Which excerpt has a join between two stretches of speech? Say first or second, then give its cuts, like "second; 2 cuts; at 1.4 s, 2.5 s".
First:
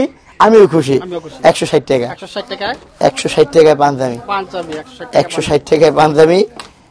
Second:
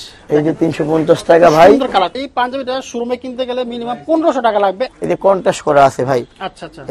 second; 2 cuts; at 2.2 s, 4.9 s